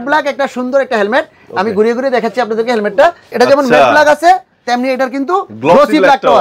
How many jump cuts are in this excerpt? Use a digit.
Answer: 1